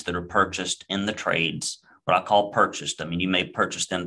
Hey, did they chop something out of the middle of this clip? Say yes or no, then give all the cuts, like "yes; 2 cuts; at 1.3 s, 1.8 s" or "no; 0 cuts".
no; 0 cuts